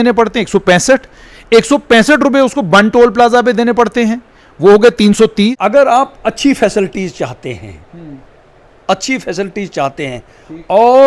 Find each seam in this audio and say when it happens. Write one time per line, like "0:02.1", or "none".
0:05.5